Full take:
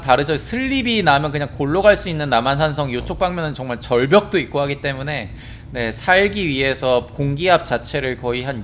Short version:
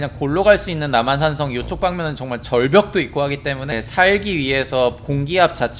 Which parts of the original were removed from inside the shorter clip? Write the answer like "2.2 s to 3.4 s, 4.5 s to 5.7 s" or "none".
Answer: 5.1 s to 5.8 s